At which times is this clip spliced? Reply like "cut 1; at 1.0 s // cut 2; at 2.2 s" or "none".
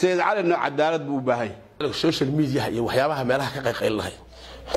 cut 1; at 1.8 s